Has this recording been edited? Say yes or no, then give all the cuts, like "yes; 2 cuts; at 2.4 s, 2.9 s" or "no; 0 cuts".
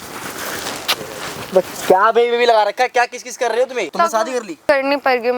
yes; 1 cut; at 4.4 s